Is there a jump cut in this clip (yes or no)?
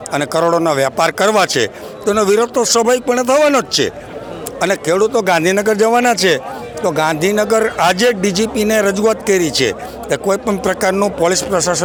no